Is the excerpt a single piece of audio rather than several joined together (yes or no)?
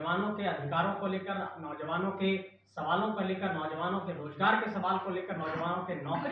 yes